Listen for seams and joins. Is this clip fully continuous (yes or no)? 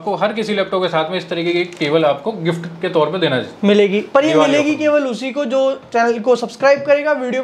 yes